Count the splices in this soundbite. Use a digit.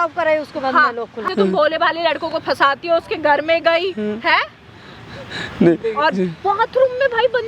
1